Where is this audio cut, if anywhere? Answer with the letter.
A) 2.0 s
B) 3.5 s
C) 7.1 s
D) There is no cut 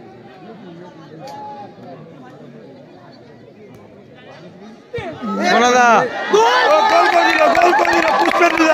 D